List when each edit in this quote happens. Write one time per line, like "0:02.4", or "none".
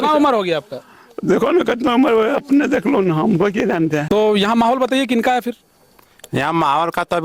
0:04.0